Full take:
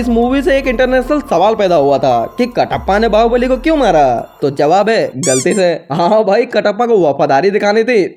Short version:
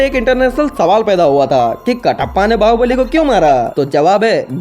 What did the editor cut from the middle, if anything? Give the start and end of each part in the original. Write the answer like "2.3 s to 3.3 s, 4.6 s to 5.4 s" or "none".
4.2 s to 4.3 s